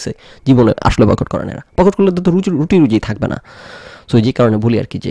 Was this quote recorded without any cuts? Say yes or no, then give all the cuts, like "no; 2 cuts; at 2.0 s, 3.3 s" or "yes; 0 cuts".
yes; 0 cuts